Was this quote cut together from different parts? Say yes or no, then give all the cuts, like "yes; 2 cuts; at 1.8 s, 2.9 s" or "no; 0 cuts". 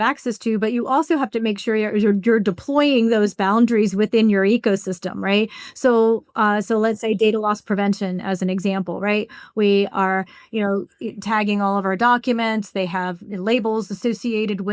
no; 0 cuts